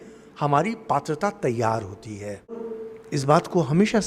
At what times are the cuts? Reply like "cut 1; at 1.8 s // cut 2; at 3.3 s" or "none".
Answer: cut 1; at 2.7 s